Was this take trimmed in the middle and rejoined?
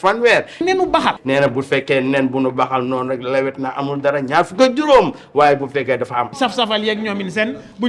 no; 0 cuts

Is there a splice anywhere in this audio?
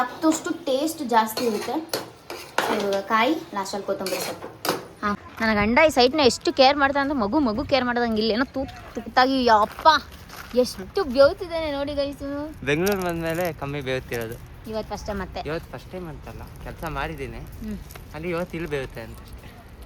yes; 2 cuts; at 5.2 s, 9.1 s

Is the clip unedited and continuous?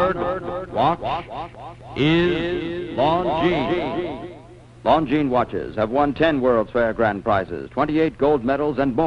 yes; 0 cuts

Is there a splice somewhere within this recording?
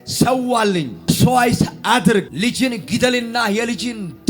yes; 2 cuts; at 1.1 s, 2.3 s

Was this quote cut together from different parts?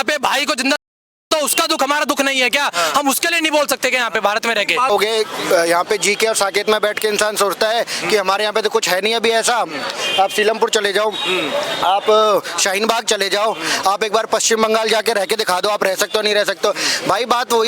yes; 1 cut; at 4.9 s

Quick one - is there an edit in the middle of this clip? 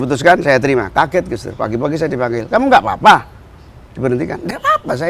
no; 0 cuts

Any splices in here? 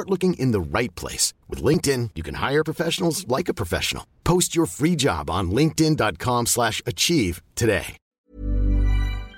yes; 1 cut; at 8.0 s

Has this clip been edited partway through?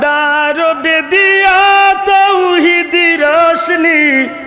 no; 0 cuts

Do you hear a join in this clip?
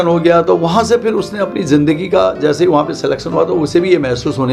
no; 0 cuts

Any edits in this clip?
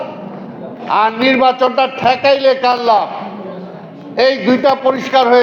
no; 0 cuts

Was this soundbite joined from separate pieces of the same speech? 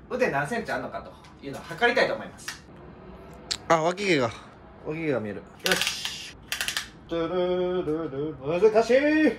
yes; 1 cut; at 8.4 s

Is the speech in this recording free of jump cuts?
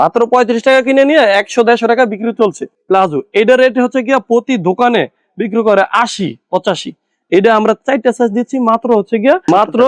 yes; 0 cuts

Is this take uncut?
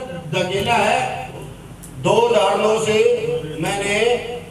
no; 1 cut; at 1.3 s

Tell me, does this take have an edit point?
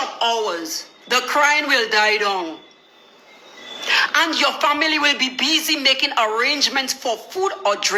no; 0 cuts

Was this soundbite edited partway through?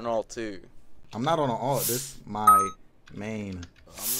no; 0 cuts

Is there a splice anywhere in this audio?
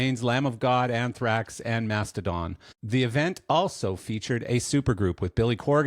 yes; 1 cut; at 2.7 s

